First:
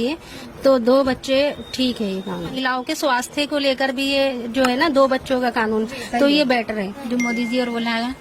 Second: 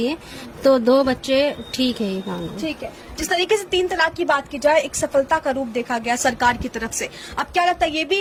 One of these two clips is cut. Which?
first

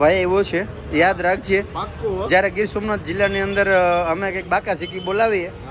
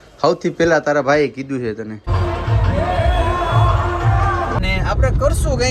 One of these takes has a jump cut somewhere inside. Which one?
second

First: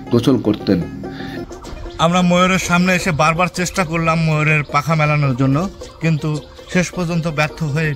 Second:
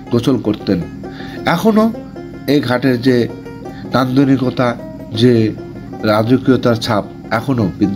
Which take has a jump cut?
first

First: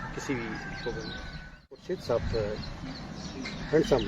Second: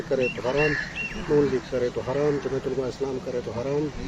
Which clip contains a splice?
first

